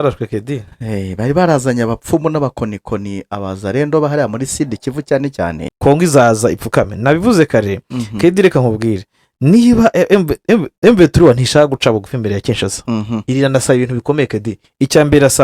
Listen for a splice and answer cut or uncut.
cut